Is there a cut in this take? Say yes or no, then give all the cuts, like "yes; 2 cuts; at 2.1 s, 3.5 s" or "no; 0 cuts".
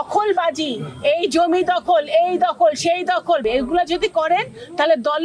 yes; 1 cut; at 3.4 s